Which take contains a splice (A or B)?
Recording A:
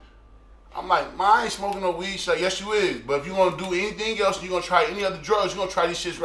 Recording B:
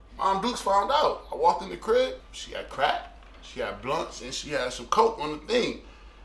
B